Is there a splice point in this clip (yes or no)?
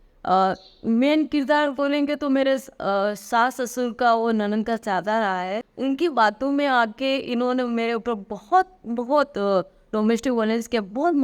yes